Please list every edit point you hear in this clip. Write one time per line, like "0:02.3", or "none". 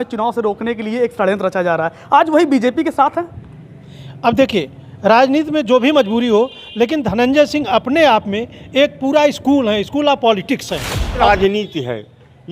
0:11.2

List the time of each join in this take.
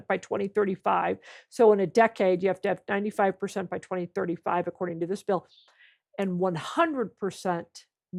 none

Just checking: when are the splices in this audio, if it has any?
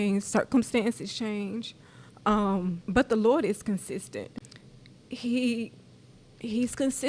0:02.8
0:04.3

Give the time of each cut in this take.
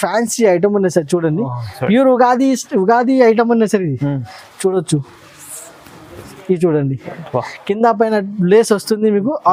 none

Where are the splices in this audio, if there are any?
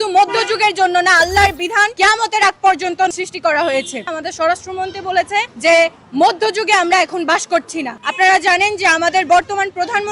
0:01.9
0:03.1
0:04.1
0:05.5
0:08.0

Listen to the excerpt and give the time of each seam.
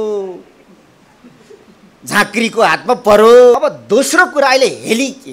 0:03.5

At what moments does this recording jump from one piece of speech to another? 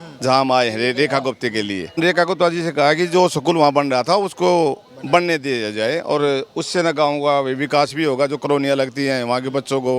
0:02.0

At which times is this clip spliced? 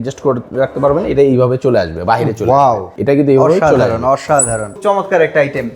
0:02.9
0:04.8

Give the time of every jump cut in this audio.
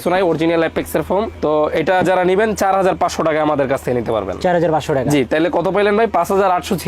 none

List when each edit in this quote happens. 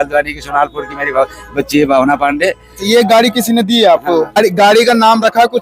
0:04.4

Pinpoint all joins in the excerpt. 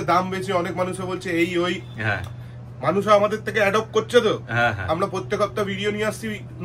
none

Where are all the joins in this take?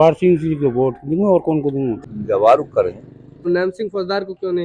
0:02.0
0:03.5

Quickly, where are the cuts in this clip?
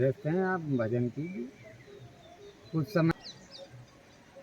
0:03.1

